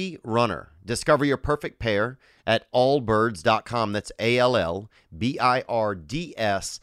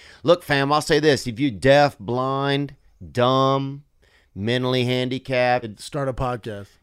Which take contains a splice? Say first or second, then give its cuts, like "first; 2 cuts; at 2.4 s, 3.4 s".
second; 1 cut; at 5.8 s